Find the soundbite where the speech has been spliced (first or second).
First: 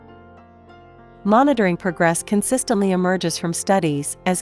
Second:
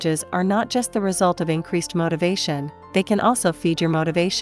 first